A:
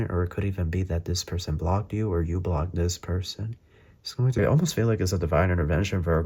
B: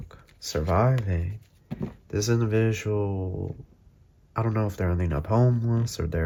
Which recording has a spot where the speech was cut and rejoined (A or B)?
A